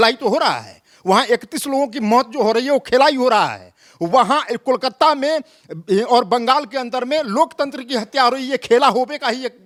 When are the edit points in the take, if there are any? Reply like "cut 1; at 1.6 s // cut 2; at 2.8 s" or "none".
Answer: none

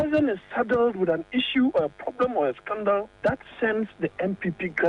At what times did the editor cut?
none

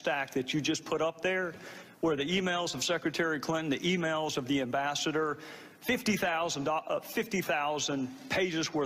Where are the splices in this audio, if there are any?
none

